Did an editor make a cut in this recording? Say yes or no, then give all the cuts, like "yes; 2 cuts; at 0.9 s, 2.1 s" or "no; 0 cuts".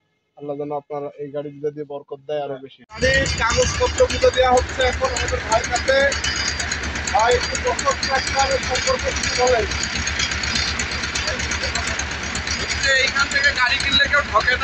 yes; 1 cut; at 2.9 s